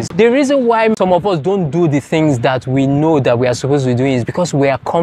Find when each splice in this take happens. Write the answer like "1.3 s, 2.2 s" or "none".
0.9 s